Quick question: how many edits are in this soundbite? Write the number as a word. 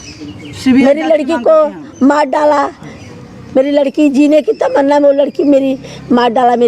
zero